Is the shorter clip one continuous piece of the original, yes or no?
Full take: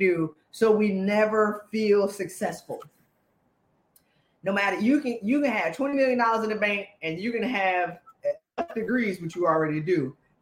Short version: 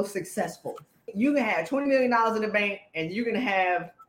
no